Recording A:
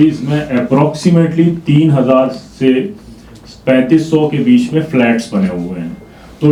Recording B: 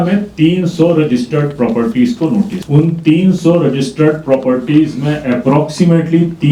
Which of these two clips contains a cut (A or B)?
B